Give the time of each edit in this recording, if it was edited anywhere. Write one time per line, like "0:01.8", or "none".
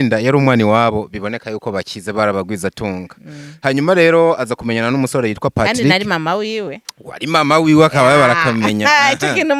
none